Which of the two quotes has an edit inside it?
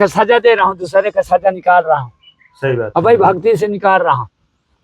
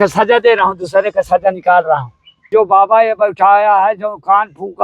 second; 1 cut; at 2.5 s

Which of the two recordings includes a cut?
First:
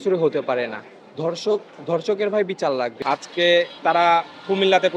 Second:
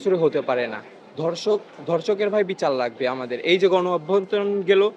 first; 1 cut; at 2.9 s

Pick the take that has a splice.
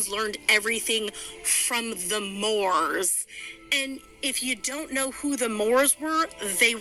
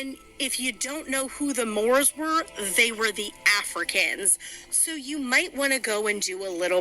second; 1 cut; at 5.6 s

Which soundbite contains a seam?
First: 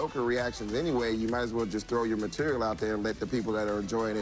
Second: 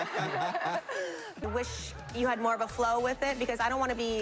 second; 1 cut; at 1.4 s

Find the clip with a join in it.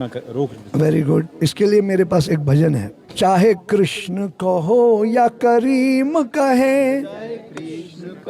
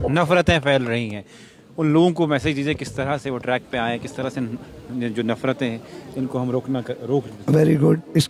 first; 1 cut; at 3.1 s

